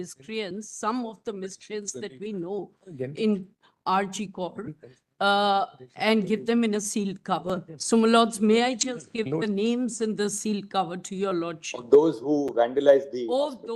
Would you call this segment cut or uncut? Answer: uncut